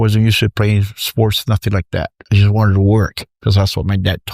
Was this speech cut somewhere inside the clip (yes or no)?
yes